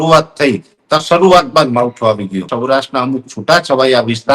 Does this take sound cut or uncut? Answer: cut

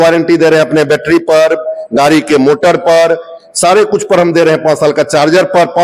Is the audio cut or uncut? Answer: uncut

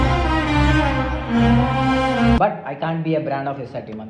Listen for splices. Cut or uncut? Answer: cut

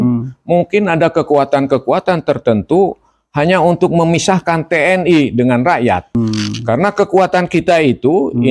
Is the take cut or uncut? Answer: cut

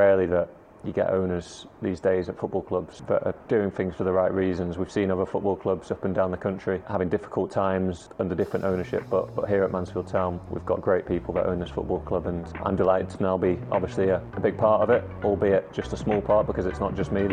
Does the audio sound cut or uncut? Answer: cut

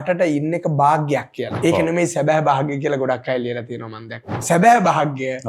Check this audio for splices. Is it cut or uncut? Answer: cut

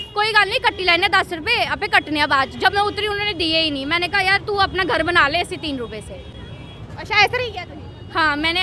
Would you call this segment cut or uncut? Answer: uncut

